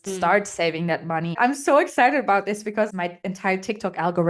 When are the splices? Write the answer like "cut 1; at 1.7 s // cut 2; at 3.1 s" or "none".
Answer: cut 1; at 1.3 s // cut 2; at 3.0 s